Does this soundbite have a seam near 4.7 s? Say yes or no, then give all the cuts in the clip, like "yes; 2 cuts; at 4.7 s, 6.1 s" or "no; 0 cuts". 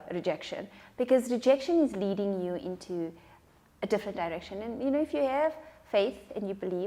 no; 0 cuts